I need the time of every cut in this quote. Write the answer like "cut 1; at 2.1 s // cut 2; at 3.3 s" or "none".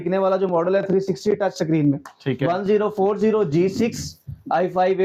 none